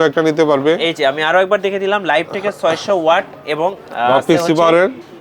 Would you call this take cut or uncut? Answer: uncut